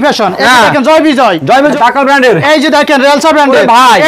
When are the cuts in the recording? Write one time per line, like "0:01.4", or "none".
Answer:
0:01.7